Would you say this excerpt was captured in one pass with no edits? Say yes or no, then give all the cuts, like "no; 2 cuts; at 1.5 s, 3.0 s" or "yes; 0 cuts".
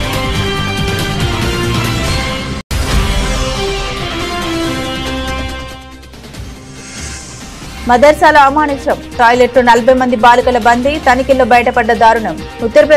no; 1 cut; at 2.6 s